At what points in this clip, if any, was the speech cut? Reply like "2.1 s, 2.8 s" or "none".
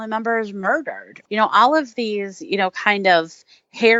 1.1 s